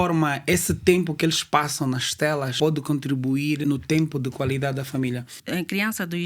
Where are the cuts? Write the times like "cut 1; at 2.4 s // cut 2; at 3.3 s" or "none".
cut 1; at 2.5 s // cut 2; at 3.6 s // cut 3; at 5.3 s

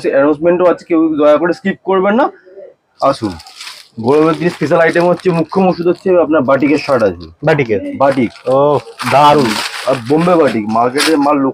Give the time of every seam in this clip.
none

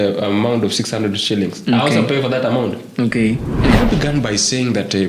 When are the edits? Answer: cut 1; at 3.5 s

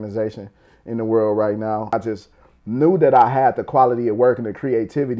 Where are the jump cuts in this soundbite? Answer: cut 1; at 1.9 s

